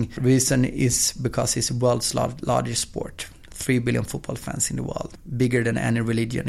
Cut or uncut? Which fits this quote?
uncut